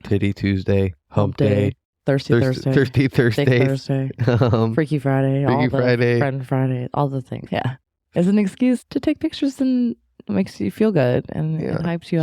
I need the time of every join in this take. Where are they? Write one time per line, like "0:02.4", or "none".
0:07.4